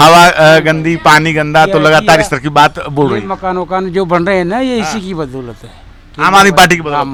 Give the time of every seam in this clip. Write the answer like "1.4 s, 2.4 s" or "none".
none